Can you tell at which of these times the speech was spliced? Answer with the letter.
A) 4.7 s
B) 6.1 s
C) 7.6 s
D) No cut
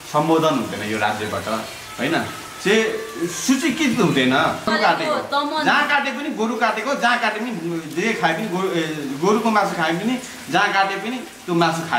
A